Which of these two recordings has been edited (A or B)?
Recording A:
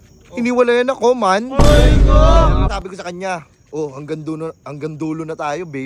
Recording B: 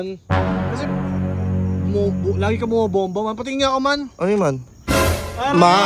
A